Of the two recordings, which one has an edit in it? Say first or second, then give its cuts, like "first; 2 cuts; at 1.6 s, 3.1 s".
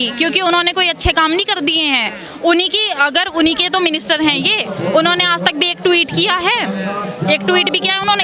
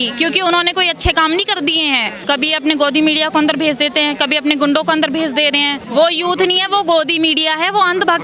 second; 2 cuts; at 2.2 s, 5.8 s